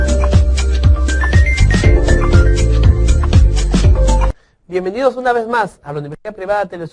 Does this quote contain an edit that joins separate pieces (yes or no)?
no